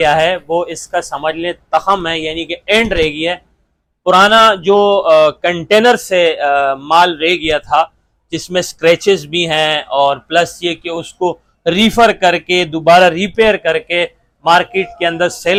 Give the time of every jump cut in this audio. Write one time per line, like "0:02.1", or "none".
none